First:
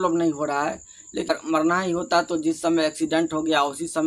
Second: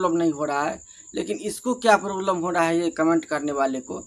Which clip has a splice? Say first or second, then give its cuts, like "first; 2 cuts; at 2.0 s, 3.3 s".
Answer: first; 1 cut; at 1.3 s